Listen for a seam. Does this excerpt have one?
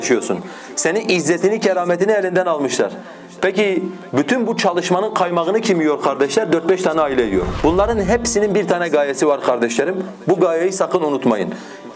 yes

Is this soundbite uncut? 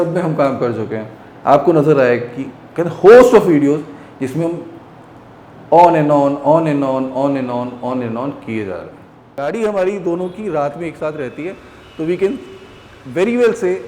no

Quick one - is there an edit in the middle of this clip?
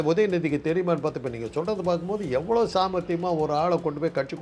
no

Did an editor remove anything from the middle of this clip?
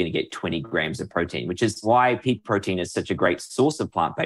yes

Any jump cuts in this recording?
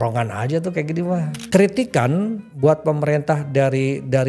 yes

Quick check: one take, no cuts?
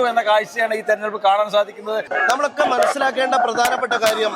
no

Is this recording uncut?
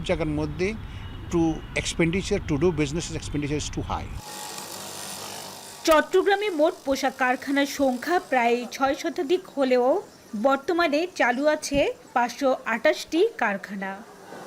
yes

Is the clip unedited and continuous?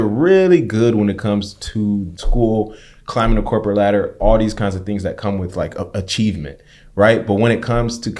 no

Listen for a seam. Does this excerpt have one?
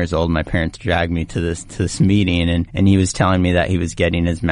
yes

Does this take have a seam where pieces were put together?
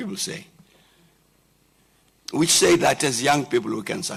no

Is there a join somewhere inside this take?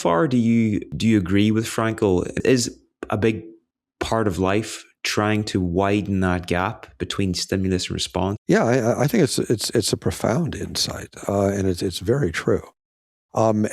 yes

